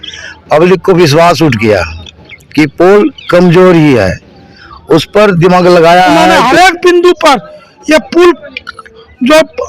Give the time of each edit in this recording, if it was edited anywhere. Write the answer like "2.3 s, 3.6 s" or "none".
6.4 s